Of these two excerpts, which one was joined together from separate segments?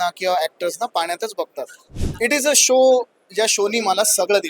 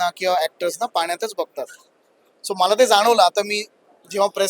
first; 1 cut; at 2.0 s

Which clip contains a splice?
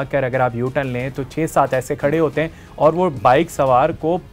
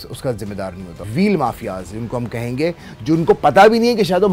second; 1 cut; at 1.0 s

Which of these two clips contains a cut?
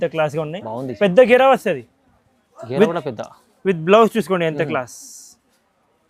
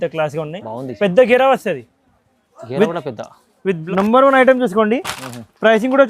second; 1 cut; at 3.8 s

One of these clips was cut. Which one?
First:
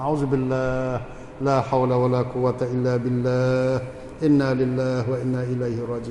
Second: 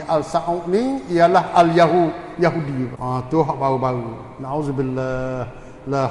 second; 1 cut; at 3.0 s

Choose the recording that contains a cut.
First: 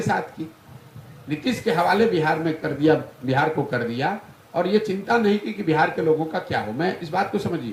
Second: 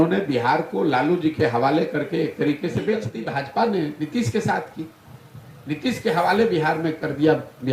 second; 1 cut; at 3.1 s

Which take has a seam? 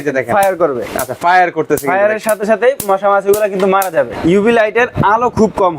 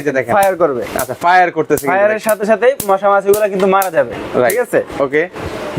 first; 1 cut; at 4.1 s

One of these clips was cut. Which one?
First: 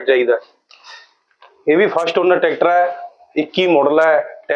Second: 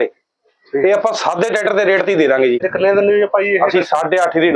second; 1 cut; at 2.7 s

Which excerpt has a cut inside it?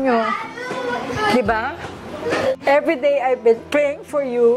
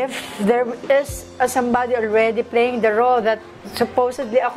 first; 1 cut; at 2.5 s

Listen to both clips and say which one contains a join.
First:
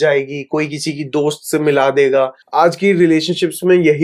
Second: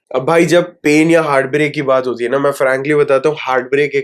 first; 1 cut; at 2.4 s

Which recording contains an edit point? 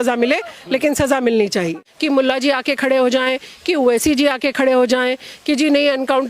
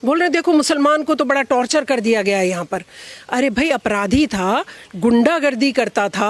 first; 1 cut; at 1.8 s

